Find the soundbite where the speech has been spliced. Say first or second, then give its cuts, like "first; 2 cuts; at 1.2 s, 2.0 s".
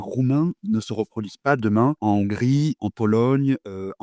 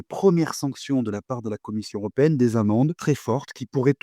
second; 1 cut; at 3.0 s